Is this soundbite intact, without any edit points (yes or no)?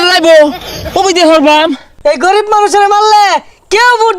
no